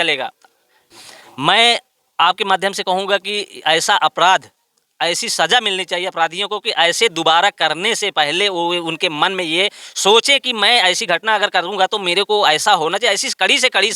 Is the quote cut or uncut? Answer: cut